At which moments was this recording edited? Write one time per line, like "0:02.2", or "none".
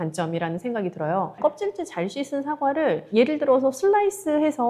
0:01.3